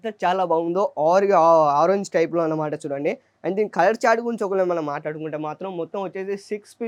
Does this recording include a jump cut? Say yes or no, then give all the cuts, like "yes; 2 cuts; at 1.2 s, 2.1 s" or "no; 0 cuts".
no; 0 cuts